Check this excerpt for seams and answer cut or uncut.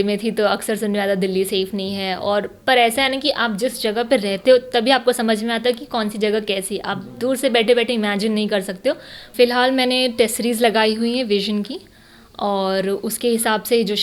cut